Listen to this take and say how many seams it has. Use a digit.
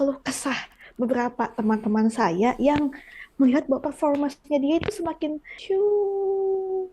1